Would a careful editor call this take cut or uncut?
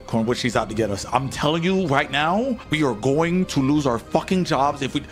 uncut